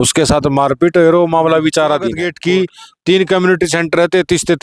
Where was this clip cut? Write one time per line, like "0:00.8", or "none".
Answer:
0:02.3